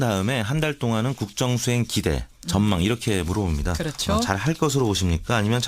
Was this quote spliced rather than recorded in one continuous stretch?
yes; 1 cut; at 2.7 s

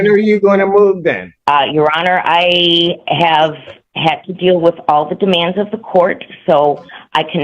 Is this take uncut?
no; 1 cut; at 1.3 s

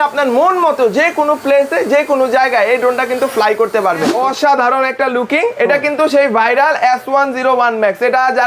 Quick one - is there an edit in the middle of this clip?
yes; 1 cut; at 4.1 s

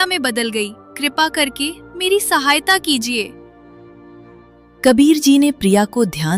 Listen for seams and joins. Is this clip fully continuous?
yes; 0 cuts

